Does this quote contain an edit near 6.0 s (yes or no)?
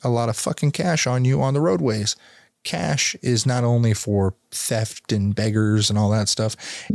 no